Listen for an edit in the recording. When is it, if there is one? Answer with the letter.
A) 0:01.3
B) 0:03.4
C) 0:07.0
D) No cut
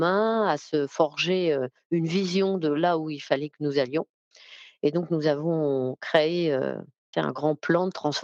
C